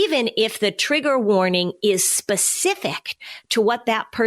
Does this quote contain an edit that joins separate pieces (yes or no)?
no